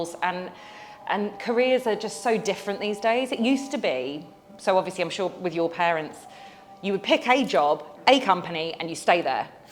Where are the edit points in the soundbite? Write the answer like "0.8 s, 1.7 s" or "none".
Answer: none